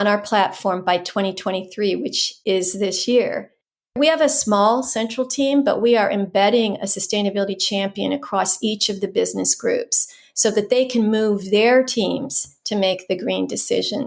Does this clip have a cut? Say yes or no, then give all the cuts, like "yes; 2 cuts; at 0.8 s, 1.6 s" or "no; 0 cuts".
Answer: yes; 2 cuts; at 2.3 s, 3.9 s